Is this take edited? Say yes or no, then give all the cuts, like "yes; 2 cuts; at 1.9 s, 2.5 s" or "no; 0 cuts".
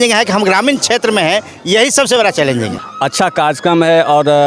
yes; 1 cut; at 2.8 s